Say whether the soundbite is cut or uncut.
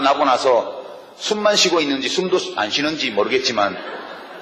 uncut